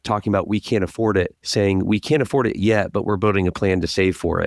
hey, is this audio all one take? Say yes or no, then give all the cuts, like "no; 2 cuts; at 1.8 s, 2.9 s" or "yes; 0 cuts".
no; 1 cut; at 1.4 s